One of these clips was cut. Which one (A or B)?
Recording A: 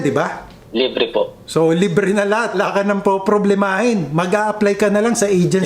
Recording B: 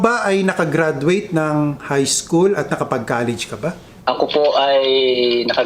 A